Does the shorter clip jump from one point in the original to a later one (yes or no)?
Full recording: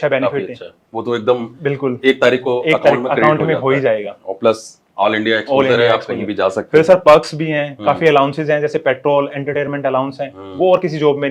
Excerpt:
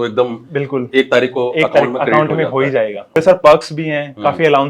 yes